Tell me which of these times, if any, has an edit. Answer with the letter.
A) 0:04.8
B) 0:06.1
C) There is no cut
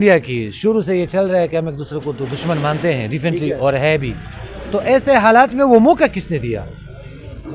C